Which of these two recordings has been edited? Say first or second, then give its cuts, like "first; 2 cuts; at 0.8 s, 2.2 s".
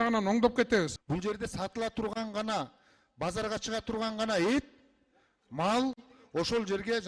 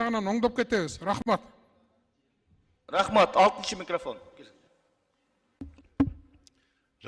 first; 1 cut; at 1.0 s